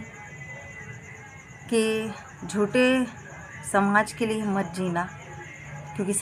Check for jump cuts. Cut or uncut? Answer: uncut